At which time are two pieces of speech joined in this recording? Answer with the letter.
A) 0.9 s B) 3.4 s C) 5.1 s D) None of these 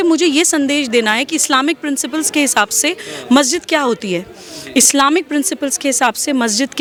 D